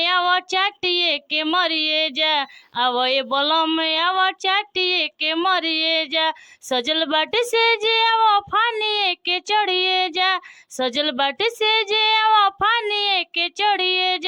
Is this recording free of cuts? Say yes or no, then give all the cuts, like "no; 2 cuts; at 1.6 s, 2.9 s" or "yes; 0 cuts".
yes; 0 cuts